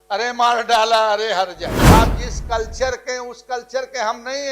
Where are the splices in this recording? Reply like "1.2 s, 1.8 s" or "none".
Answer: 1.9 s